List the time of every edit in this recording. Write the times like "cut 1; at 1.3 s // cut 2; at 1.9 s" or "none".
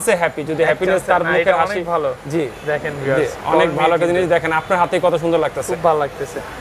none